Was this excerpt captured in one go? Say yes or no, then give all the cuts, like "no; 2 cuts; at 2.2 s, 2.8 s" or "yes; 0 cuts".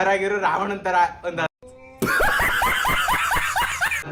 yes; 0 cuts